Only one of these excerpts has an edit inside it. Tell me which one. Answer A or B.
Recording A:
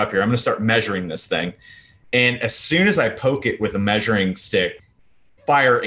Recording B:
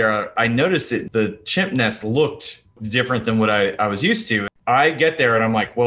B